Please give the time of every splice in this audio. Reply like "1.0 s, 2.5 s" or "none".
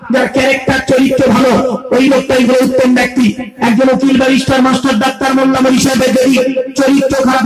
none